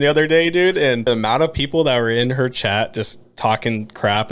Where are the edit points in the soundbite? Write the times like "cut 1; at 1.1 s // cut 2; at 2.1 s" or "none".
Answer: cut 1; at 1.0 s